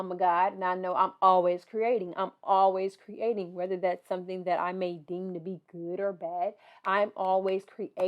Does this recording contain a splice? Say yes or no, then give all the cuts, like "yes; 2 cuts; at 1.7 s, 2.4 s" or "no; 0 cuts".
no; 0 cuts